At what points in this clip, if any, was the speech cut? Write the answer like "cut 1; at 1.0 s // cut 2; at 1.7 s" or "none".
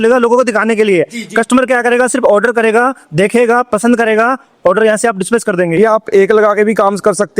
cut 1; at 5.8 s